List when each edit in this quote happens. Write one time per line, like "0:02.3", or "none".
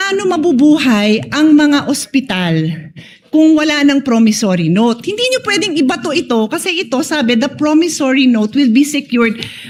none